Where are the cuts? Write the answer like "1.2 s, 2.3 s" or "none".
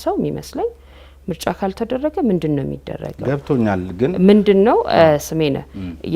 none